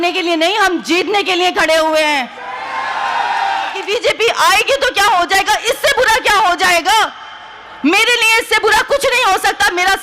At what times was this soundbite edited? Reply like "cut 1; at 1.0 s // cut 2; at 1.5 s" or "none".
cut 1; at 3.8 s